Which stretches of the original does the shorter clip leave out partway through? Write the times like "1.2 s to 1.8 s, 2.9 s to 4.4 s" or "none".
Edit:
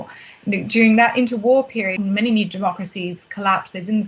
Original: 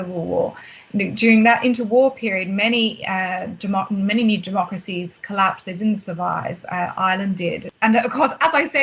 2.4 s to 3.9 s